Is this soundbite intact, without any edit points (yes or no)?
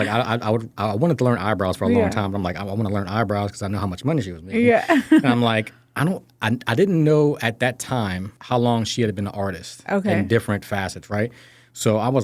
no